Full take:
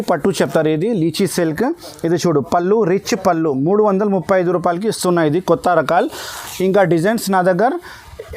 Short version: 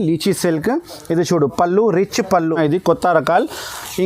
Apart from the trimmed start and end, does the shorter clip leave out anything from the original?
yes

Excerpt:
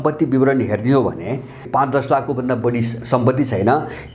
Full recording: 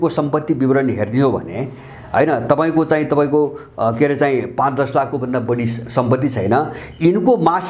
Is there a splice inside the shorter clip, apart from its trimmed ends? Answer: yes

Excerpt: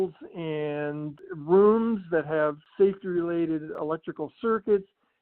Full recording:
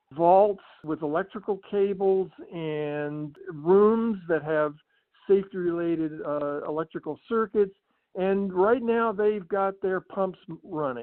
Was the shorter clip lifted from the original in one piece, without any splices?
no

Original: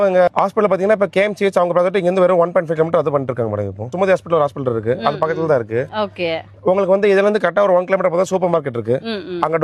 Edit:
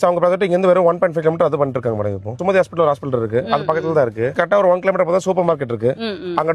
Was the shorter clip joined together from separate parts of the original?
yes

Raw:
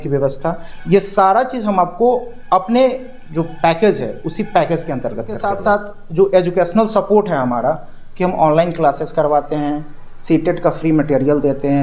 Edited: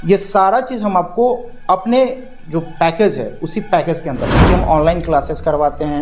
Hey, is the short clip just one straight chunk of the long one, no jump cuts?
no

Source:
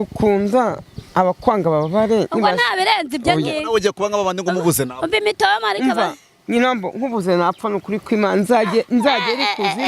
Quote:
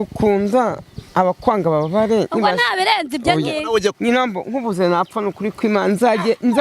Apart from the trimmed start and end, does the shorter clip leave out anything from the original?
yes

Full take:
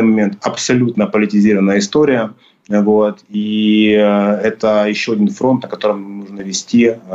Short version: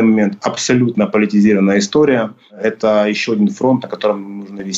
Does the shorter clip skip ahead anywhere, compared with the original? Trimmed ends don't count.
yes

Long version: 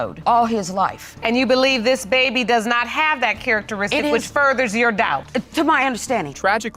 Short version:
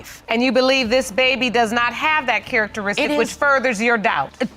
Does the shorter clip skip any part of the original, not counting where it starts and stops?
no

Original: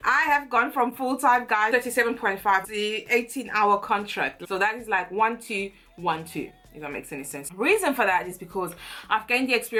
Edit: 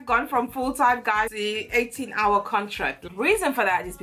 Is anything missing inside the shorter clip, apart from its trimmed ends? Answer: yes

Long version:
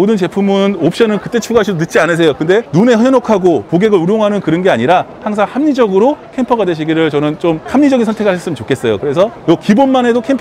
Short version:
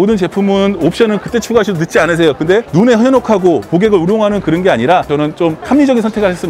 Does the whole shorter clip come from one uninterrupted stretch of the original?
no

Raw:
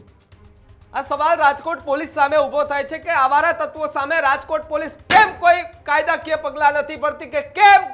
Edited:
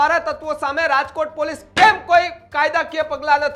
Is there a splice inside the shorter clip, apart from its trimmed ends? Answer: no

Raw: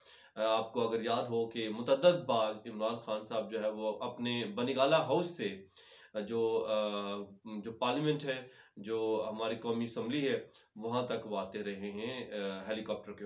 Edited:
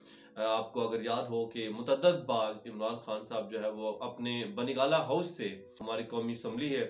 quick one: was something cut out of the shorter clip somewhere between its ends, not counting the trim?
yes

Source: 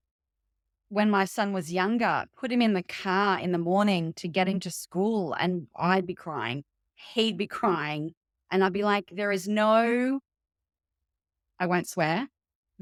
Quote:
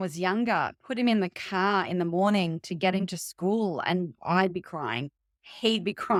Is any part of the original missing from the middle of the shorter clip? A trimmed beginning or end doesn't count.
no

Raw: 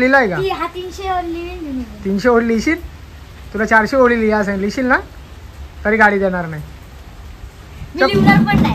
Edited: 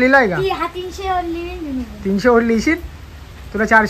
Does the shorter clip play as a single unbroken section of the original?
yes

